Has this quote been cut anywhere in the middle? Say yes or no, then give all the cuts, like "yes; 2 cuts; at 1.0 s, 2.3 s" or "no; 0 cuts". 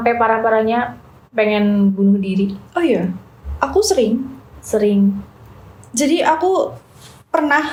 no; 0 cuts